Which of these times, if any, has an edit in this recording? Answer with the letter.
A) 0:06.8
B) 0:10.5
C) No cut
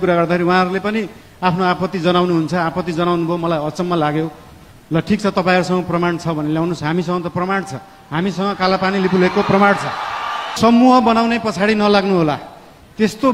B